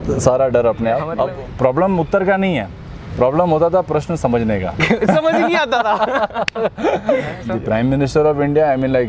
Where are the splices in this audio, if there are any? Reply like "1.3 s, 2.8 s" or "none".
1.1 s, 7.4 s